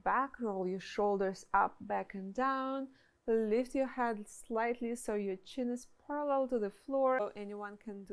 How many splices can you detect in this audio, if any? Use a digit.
1